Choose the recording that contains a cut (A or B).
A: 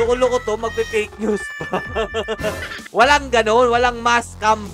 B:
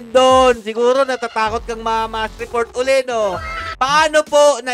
B